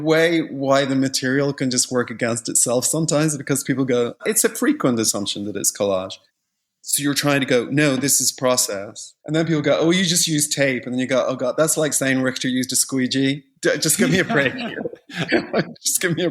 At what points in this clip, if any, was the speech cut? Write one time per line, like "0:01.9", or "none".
0:15.3

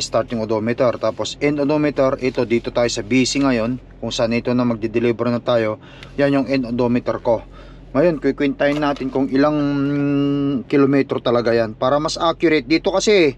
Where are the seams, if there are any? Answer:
none

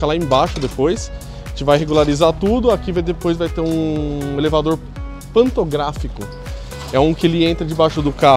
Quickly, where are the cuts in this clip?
none

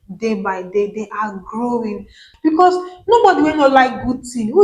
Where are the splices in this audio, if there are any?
0:02.3

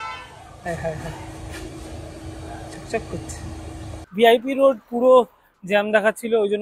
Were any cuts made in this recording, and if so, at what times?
0:04.0

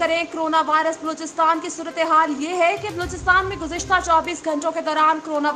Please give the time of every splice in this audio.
none

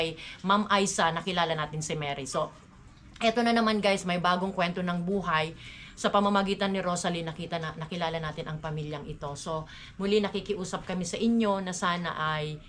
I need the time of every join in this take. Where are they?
none

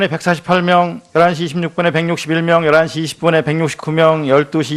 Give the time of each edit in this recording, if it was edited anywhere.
none

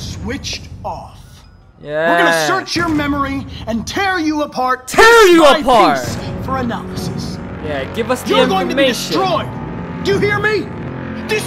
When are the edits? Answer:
none

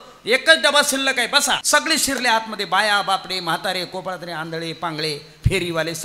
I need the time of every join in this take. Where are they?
0:01.6

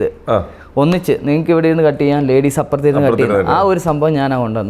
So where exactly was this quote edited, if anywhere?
none

